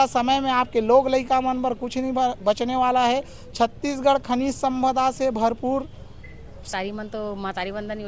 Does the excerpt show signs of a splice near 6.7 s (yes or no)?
yes